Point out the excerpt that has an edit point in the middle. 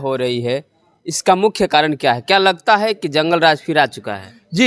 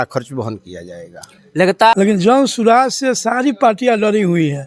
second; 1 cut; at 1.9 s

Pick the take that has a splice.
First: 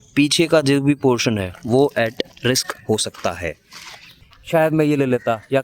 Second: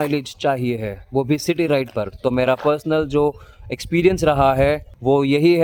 first; 1 cut; at 4.2 s

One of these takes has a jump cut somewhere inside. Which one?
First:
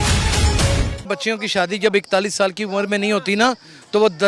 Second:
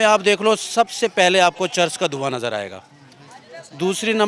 first; 1 cut; at 1.1 s

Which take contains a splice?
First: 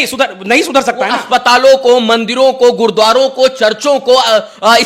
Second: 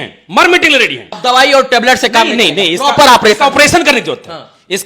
second; 1 cut; at 1.1 s

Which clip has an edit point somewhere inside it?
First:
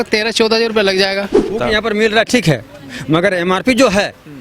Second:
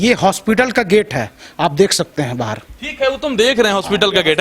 first; 1 cut; at 1.5 s

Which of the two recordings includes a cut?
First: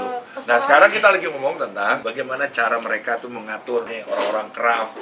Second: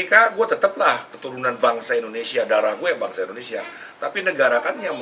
first; 2 cuts; at 2.0 s, 3.9 s

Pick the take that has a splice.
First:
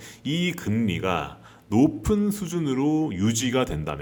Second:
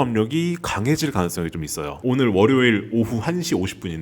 second; 1 cut; at 2.0 s

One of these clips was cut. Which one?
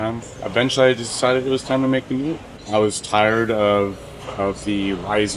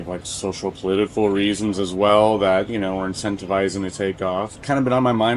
first; 1 cut; at 2.5 s

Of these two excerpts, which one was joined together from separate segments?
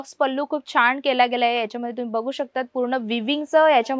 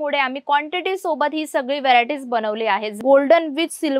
second; 1 cut; at 3.0 s

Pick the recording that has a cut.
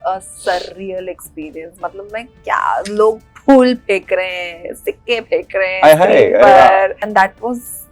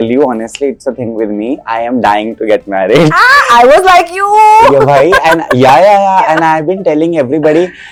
first; 1 cut; at 7.0 s

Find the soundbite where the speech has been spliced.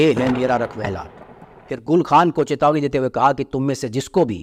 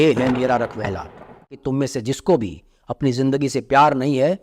second; 1 cut; at 1.6 s

